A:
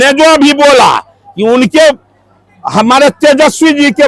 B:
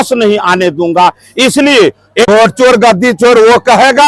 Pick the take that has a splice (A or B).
B